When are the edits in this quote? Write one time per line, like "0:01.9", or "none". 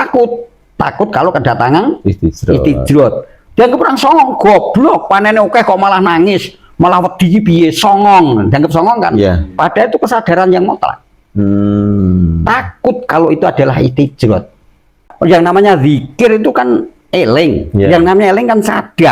0:15.1